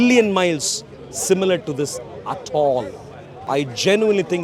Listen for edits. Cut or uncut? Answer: cut